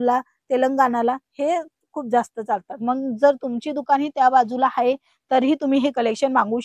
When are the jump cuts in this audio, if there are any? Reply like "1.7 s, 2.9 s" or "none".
none